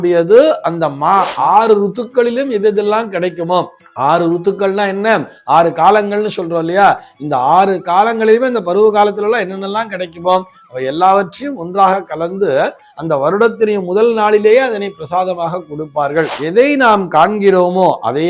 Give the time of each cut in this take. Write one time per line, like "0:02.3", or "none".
0:01.3
0:16.4